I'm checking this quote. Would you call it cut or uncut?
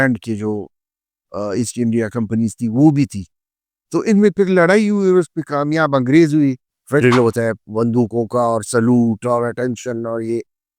cut